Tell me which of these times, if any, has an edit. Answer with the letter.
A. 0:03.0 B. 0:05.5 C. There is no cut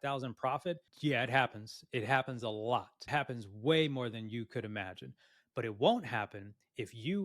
A